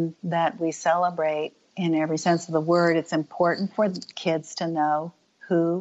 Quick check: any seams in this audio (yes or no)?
no